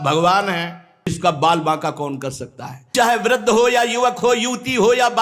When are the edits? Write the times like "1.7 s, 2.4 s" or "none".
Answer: 1.2 s, 2.9 s